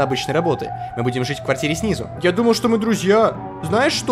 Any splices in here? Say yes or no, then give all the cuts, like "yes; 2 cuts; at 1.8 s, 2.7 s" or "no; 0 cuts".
yes; 1 cut; at 2.1 s